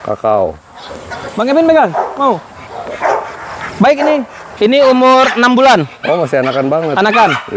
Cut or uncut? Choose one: cut